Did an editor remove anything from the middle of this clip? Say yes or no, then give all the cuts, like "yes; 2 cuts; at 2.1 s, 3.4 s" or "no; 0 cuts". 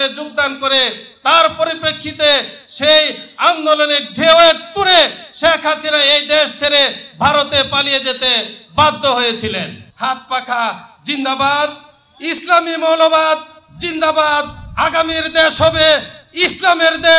yes; 1 cut; at 9.8 s